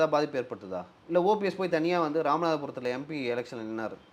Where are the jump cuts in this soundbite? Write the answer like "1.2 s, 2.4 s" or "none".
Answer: none